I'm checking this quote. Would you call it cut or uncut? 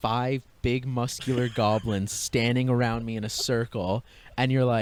uncut